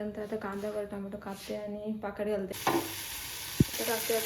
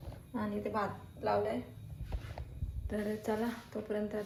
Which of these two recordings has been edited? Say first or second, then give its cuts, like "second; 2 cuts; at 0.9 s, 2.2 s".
first; 1 cut; at 2.5 s